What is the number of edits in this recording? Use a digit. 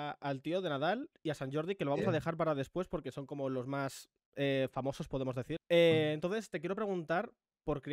1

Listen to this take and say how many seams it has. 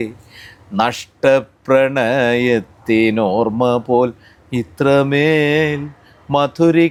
0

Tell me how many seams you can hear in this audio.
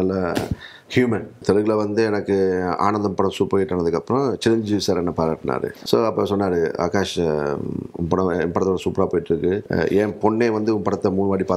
3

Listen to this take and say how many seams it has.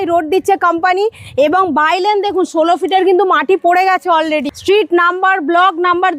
1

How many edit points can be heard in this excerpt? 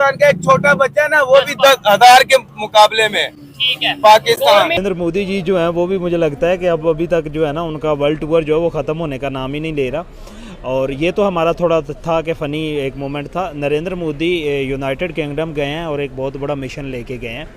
1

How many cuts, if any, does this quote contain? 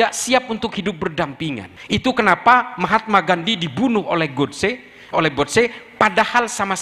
1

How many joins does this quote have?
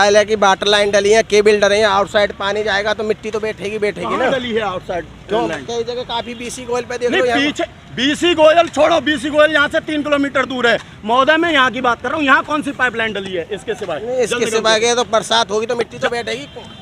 0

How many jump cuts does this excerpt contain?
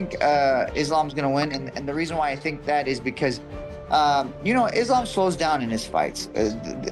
0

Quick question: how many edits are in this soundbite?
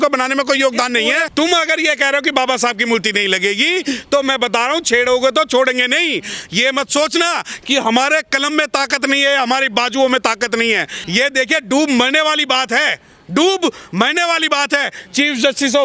2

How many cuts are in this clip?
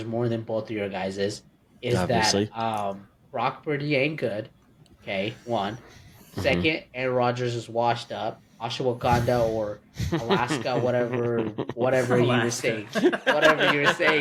0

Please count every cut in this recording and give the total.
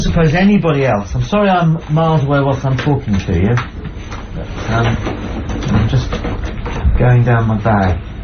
1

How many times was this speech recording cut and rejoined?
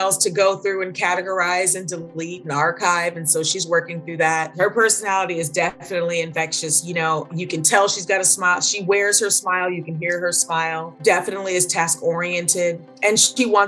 3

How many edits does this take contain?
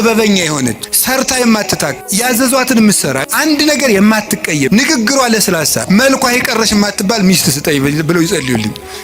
5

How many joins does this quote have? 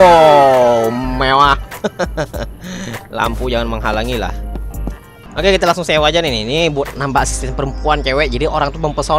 1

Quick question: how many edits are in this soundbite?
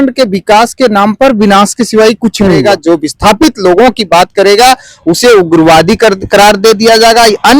1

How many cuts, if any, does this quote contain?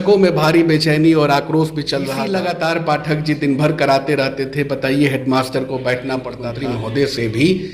2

